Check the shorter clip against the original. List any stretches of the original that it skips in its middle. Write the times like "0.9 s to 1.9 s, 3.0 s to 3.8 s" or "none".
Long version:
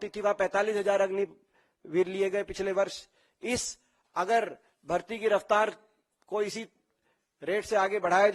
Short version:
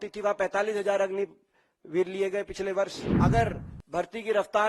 3.0 s to 4.0 s